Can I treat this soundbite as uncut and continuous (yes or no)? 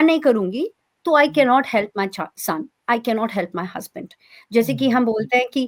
yes